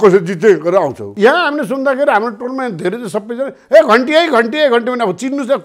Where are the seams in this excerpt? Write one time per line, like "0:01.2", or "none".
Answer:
0:01.0